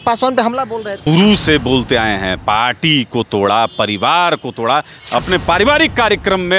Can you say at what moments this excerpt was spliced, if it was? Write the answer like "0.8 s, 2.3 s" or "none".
1.0 s, 5.0 s